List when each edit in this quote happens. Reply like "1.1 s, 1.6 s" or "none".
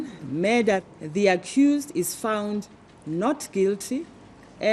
1.0 s